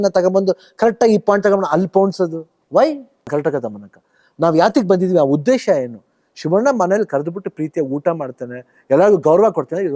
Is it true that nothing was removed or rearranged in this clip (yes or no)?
no